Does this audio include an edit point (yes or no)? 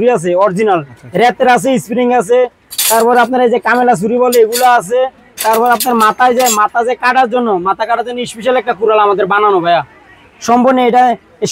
no